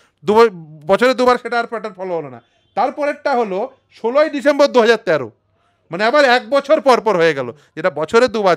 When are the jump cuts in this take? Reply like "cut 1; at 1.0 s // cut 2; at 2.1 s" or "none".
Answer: none